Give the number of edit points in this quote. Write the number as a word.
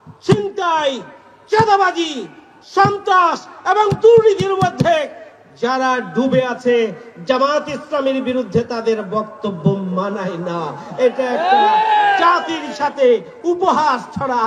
zero